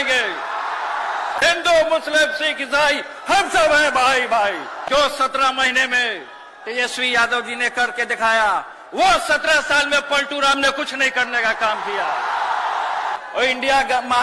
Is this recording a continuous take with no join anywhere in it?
no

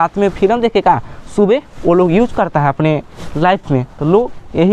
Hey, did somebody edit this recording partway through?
no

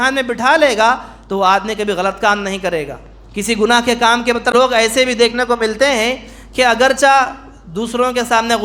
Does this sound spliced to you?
yes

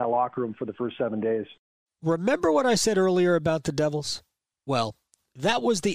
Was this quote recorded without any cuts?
yes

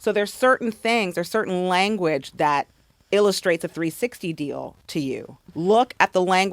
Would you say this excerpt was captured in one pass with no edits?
no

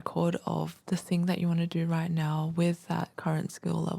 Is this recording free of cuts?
yes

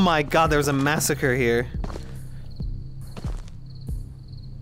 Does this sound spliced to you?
no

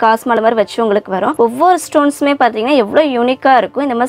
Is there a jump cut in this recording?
yes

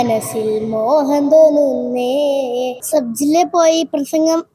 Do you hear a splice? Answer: yes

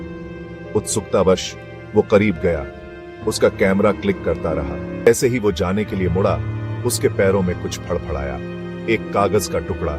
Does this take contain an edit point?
yes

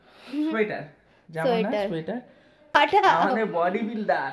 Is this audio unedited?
no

